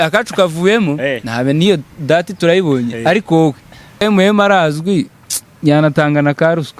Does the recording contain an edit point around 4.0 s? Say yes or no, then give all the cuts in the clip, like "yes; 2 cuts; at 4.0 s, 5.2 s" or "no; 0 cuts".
yes; 1 cut; at 4.0 s